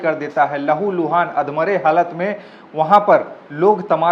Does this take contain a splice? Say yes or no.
no